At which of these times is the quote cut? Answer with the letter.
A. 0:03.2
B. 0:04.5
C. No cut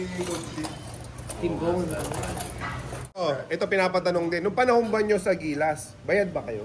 A